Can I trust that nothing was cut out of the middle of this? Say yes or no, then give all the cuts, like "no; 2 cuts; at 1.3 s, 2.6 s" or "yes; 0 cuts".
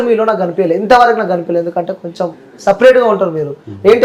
yes; 0 cuts